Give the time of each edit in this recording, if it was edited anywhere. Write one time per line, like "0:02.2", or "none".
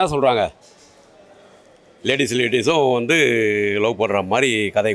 none

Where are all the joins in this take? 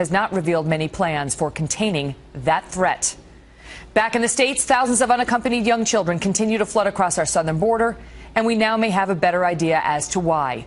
none

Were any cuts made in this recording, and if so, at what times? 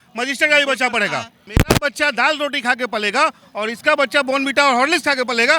0:01.4

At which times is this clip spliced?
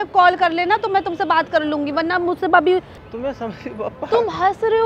0:02.9

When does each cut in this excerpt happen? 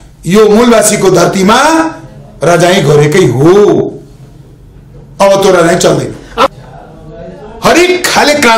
0:06.5

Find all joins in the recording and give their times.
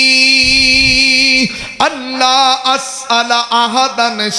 none

